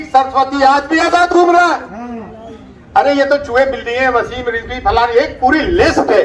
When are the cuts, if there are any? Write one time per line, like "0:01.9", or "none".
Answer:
none